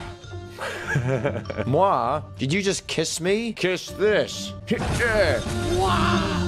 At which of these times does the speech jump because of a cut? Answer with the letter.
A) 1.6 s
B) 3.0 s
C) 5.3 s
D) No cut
A